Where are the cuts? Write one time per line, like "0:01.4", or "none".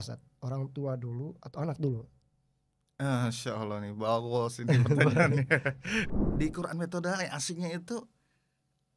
0:06.2